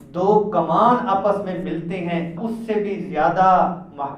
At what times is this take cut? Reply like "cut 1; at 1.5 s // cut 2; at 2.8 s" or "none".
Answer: cut 1; at 2.5 s